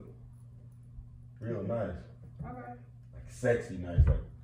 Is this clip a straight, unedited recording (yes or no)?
yes